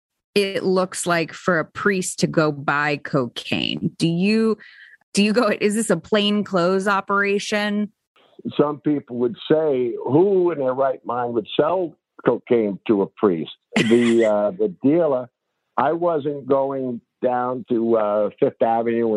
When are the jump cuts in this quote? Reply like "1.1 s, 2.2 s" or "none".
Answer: 8.0 s